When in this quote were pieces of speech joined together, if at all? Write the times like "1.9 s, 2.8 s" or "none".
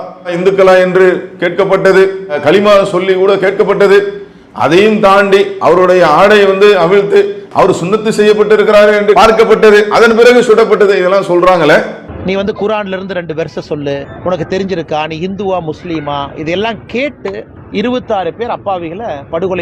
none